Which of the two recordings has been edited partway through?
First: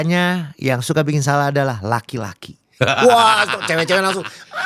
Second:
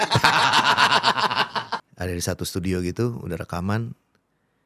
second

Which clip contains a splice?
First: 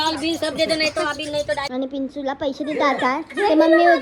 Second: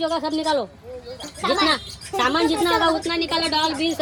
first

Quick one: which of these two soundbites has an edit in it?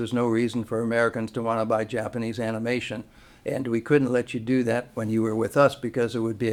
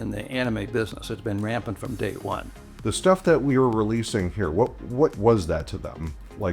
second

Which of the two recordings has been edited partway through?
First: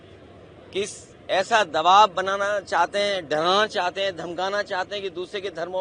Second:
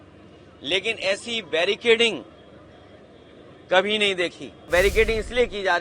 second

